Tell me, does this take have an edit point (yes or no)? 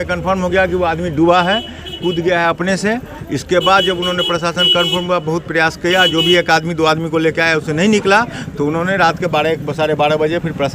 no